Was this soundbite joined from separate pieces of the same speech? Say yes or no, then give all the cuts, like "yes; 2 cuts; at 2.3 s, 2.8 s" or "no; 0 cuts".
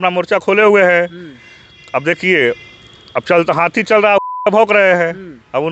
no; 0 cuts